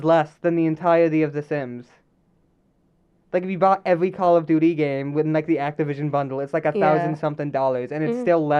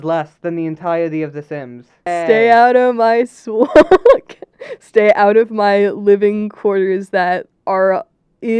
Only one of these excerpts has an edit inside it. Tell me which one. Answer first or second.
second